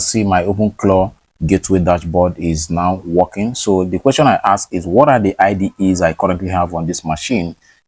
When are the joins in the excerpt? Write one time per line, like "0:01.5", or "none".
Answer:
none

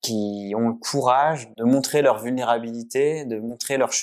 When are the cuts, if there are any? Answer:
0:01.5

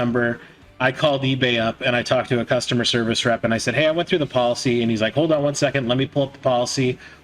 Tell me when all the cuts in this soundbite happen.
none

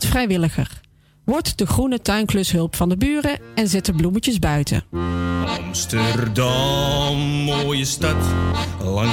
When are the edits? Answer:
none

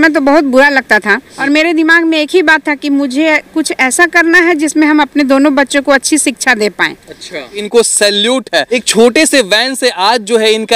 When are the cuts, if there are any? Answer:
0:01.3
0:07.6
0:08.8

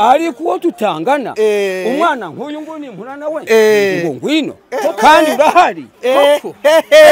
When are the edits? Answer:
none

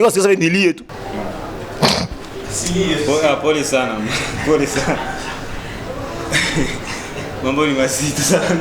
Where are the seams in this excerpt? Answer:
0:00.9

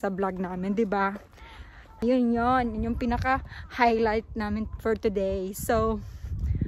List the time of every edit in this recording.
0:02.0

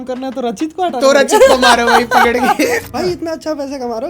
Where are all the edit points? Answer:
0:02.8

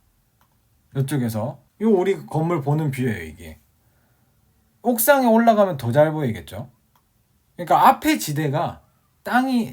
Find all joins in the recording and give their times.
0:01.6

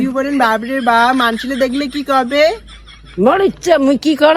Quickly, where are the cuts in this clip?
none

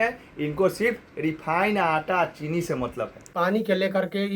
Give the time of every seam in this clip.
0:03.2

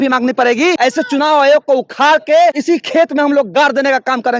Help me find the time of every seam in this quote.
0:00.8
0:02.6

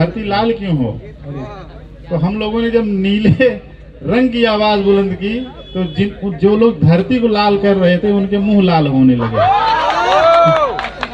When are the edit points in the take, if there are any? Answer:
none

